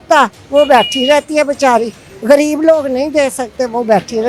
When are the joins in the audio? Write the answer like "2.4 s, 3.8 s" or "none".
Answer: none